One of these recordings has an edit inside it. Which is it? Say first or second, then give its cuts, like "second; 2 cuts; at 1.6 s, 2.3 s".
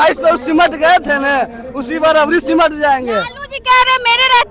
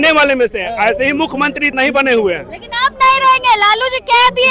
second; 1 cut; at 1.7 s